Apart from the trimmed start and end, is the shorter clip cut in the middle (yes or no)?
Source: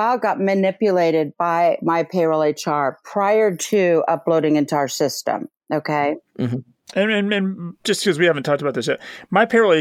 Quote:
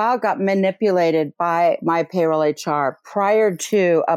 no